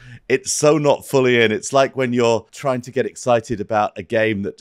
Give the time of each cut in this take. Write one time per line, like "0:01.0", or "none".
0:02.5

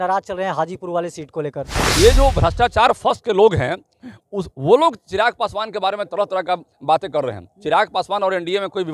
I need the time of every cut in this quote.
0:01.8

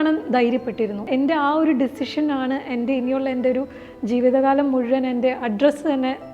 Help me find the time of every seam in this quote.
0:01.0

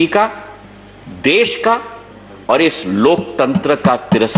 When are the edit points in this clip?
none

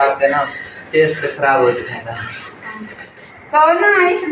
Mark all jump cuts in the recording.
0:03.1

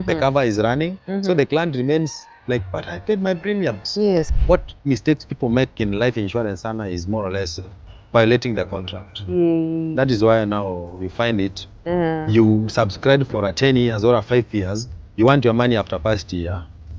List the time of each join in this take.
0:04.4

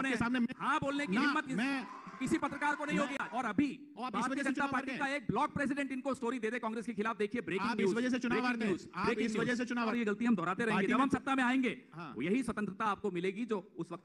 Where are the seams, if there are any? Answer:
0:03.3
0:09.9

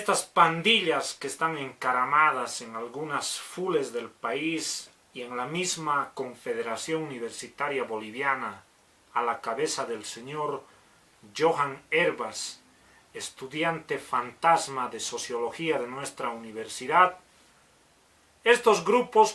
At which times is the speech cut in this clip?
none

